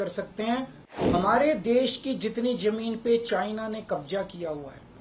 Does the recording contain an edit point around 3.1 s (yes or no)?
no